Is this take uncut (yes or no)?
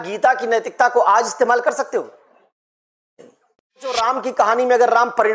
no